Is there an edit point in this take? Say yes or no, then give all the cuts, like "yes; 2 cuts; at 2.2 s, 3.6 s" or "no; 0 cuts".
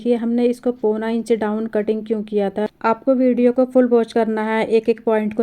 yes; 1 cut; at 2.7 s